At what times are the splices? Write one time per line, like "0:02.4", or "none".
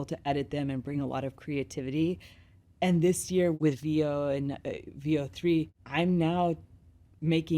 0:03.5
0:05.8